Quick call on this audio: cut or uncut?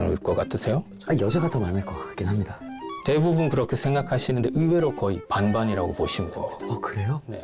cut